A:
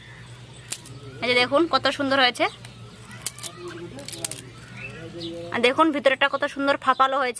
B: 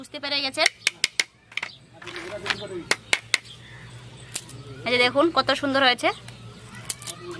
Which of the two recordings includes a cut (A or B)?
A